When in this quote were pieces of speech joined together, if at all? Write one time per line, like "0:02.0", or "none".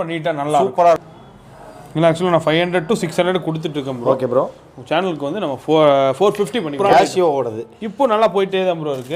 0:01.0
0:06.8